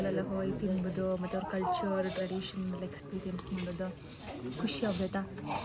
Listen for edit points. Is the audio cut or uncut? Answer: uncut